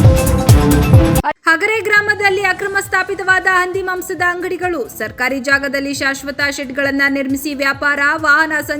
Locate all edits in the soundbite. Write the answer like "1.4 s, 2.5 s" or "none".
0.9 s

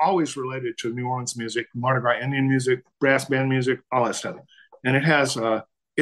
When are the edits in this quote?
2.9 s

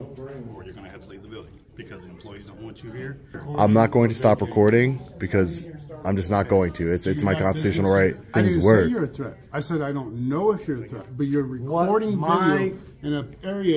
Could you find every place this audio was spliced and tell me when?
3.4 s, 8.3 s

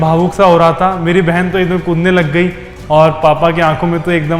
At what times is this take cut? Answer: 2.7 s

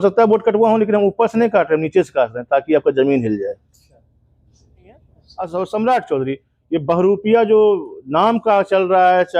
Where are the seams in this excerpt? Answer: 5.2 s

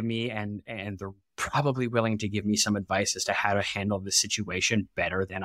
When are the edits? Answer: none

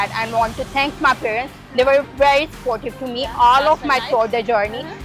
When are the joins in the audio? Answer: none

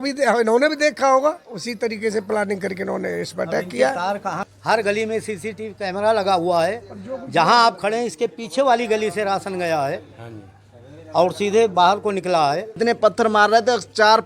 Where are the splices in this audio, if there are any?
4.4 s, 12.8 s

